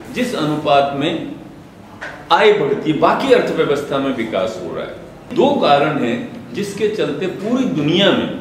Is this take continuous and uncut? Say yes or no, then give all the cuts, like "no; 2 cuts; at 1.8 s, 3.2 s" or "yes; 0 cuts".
no; 1 cut; at 5.3 s